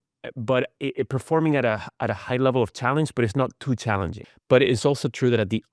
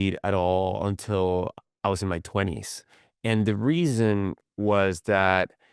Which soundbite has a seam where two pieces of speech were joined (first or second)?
first